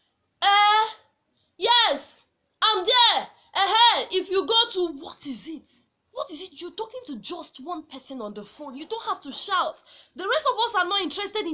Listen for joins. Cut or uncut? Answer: uncut